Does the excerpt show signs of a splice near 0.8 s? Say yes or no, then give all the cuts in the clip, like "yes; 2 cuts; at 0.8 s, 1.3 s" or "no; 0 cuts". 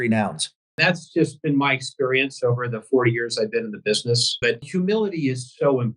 yes; 2 cuts; at 0.8 s, 4.5 s